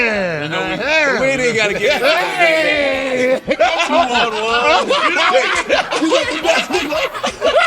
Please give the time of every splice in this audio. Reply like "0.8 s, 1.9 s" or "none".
none